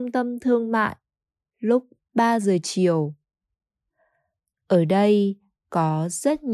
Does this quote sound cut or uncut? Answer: cut